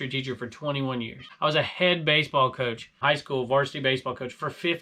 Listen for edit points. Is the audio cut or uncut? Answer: cut